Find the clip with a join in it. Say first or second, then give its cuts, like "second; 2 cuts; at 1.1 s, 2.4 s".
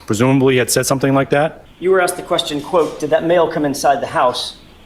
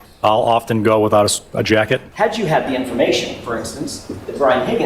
second; 1 cut; at 2.1 s